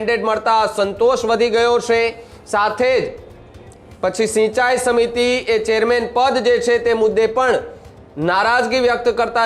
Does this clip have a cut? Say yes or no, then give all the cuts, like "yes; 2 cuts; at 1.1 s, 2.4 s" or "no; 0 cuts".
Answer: no; 0 cuts